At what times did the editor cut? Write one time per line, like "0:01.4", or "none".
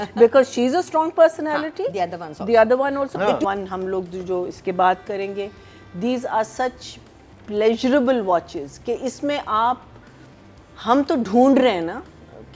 0:03.4